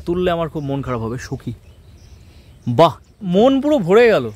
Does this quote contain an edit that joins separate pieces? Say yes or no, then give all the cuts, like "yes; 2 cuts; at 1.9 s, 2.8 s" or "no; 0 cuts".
yes; 1 cut; at 3.3 s